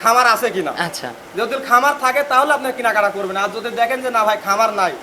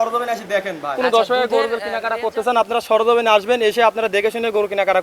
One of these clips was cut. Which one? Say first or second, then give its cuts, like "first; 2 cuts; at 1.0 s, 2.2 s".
second; 1 cut; at 1.0 s